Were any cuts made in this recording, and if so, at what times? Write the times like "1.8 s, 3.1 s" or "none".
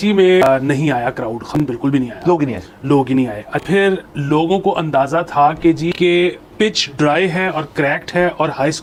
none